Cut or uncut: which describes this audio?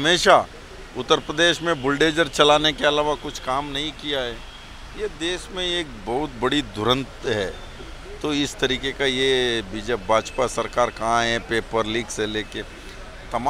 uncut